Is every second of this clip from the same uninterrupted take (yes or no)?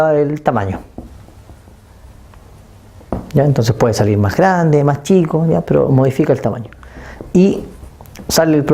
no